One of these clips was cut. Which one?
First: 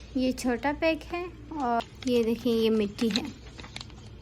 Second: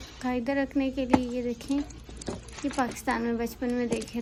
first; 1 cut; at 1.8 s

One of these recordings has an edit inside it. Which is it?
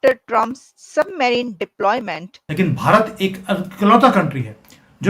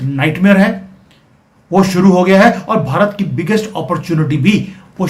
first; 1 cut; at 2.5 s

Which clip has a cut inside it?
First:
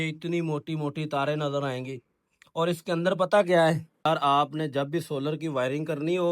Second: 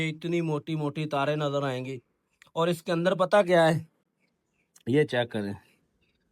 first; 1 cut; at 4.0 s

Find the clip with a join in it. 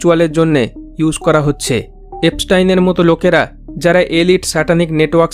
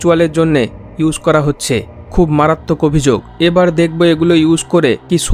first; 1 cut; at 2.0 s

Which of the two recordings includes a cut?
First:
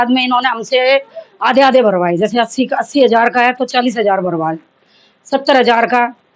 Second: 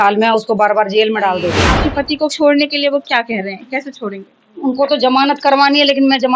second; 1 cut; at 1.7 s

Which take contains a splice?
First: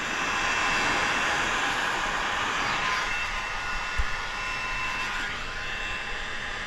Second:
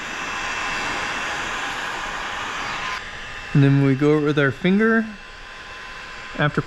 second; 1 cut; at 3.0 s

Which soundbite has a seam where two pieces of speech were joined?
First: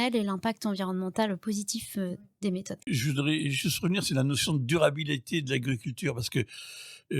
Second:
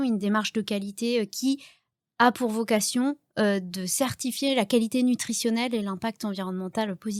first; 1 cut; at 2.9 s

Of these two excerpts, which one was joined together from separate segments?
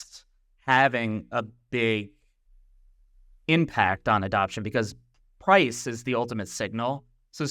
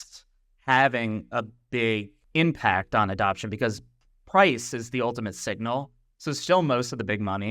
second; 1 cut; at 2.2 s

